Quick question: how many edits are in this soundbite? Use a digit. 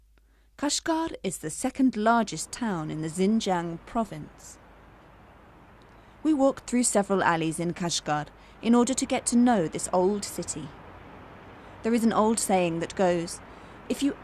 1